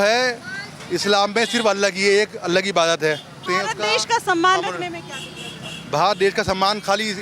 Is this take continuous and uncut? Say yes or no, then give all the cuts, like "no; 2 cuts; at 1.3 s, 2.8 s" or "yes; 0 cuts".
no; 1 cut; at 3.4 s